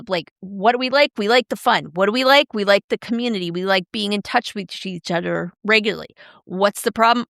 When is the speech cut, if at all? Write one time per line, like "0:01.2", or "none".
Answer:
none